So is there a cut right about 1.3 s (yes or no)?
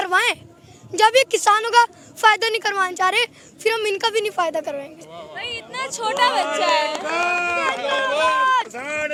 no